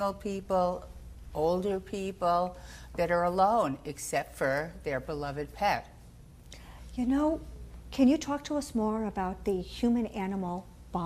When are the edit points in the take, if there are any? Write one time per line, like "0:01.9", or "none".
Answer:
none